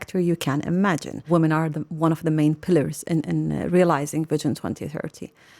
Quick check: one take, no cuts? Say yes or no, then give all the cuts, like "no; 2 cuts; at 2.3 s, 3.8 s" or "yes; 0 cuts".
no; 1 cut; at 1.2 s